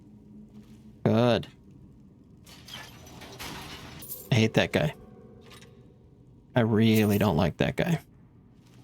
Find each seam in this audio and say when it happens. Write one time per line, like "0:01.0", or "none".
0:04.1